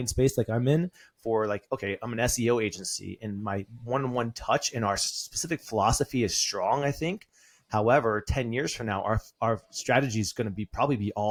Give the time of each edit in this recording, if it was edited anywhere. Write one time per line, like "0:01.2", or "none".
none